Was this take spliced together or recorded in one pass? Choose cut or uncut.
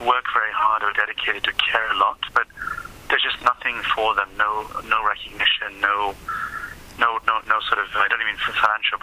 uncut